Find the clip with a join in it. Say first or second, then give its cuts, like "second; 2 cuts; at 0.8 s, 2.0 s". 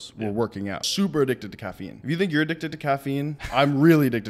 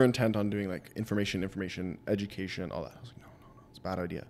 first; 3 cuts; at 0.9 s, 1.9 s, 3.4 s